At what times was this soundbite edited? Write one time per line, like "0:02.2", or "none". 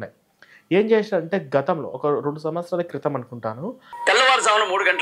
0:03.9

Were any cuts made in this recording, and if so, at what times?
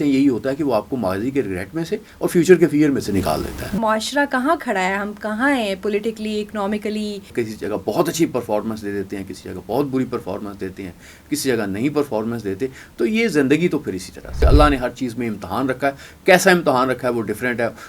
0:03.8
0:07.3
0:14.4

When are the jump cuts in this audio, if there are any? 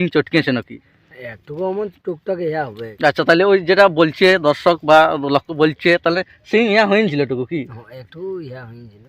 0:02.8

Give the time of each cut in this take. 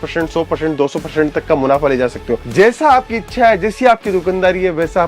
0:02.4

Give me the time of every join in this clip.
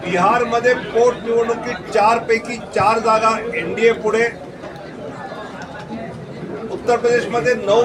none

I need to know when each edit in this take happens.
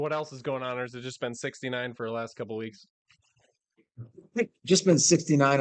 none

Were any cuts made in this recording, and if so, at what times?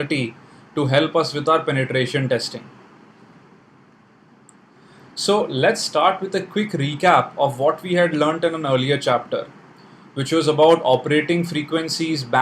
0:08.4

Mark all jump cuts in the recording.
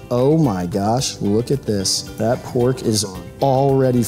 0:02.0

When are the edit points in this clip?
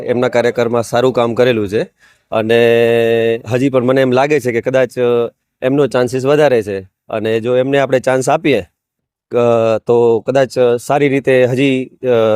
none

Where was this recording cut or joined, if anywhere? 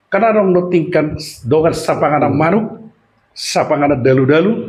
none

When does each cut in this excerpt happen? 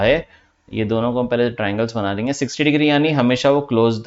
none

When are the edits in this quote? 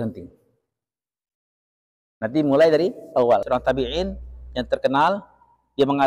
0:03.4

